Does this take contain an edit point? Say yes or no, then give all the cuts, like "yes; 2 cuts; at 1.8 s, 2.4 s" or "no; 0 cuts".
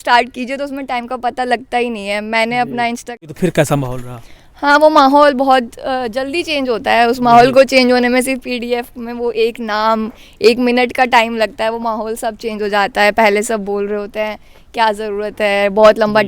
yes; 1 cut; at 3.3 s